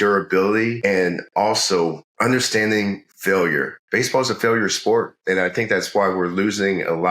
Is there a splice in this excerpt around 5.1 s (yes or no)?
no